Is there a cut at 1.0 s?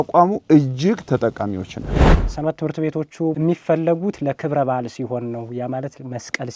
no; 2 cuts; at 2.2 s, 3.3 s

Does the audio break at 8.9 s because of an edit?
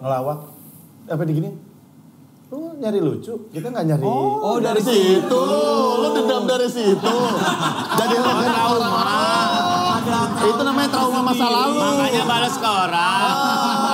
no; 0 cuts

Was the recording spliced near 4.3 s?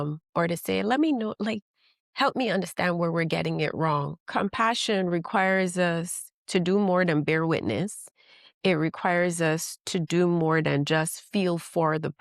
yes; 1 cut; at 4.3 s

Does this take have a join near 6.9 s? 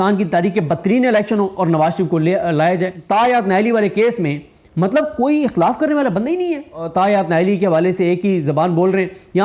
yes; 2 cuts; at 2.9 s, 6.9 s

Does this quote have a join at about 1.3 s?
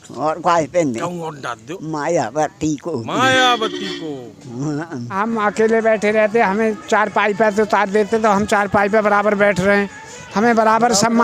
no; 1 cut; at 5.2 s

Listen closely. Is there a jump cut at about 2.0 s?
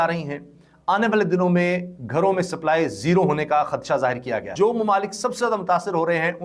no; 1 cut; at 4.5 s

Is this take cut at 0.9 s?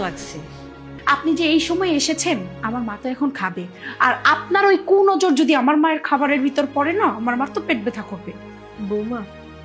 yes; 1 cut; at 0.9 s

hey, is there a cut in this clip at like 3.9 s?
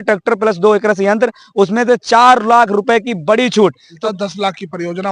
yes; 1 cut; at 3.9 s

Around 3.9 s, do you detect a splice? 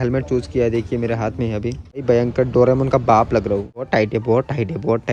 yes; 2 cuts; at 2.0 s, 3.9 s

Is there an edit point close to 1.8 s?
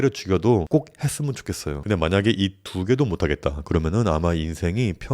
yes; 1 cut; at 1.8 s

